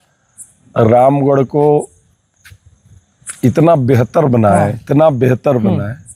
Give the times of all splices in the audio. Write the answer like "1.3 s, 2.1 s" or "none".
none